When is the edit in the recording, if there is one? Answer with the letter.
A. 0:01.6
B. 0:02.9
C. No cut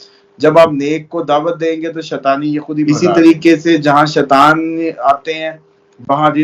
B